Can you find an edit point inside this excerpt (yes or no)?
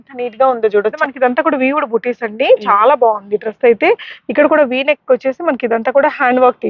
yes